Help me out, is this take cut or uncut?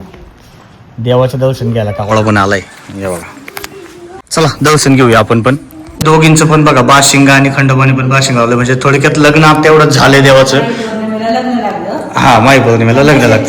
cut